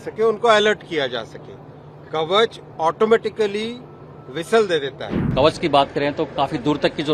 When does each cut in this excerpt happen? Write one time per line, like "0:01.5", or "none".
0:05.2